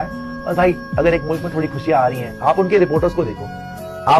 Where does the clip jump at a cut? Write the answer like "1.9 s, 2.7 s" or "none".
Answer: none